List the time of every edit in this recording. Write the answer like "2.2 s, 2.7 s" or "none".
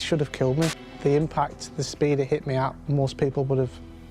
2.8 s